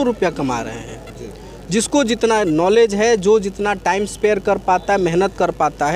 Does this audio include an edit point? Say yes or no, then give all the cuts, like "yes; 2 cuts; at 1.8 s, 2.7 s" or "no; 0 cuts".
no; 0 cuts